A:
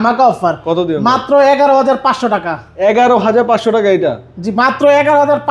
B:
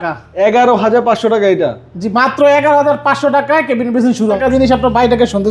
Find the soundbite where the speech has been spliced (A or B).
B